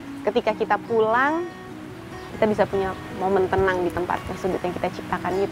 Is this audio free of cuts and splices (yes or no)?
yes